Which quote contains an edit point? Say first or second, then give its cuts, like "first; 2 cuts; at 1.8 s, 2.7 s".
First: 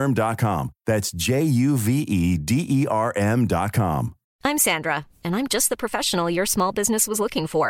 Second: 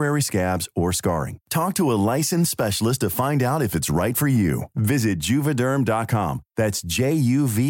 first; 1 cut; at 4.2 s